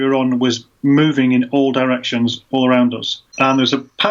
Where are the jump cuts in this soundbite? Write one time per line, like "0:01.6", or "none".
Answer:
0:03.2

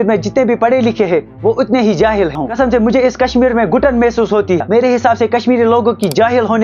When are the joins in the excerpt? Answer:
0:02.4
0:04.6

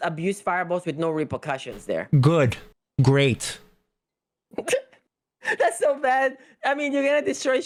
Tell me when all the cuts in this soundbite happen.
none

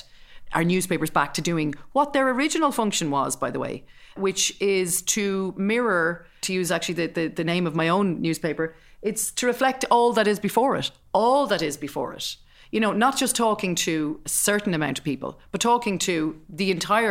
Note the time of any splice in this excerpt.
0:04.2
0:06.4

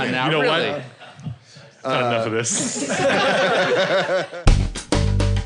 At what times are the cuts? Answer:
0:04.3

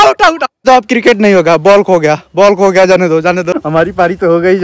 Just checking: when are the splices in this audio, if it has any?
0:03.6

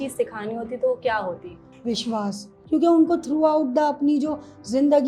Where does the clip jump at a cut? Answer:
0:01.7
0:02.5

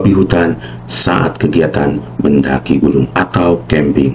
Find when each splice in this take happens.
0:03.1

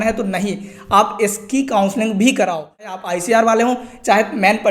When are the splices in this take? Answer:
0:02.9

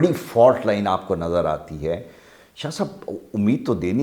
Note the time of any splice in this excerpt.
none

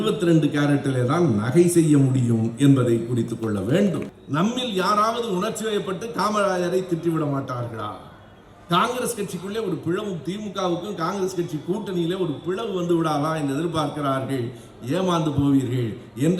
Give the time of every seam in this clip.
0:04.1

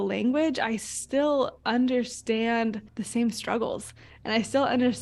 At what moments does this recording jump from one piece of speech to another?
0:02.9

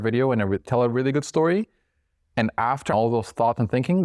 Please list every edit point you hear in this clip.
0:02.9

